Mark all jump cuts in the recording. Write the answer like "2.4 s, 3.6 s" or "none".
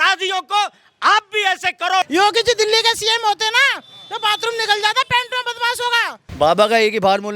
2.0 s, 6.3 s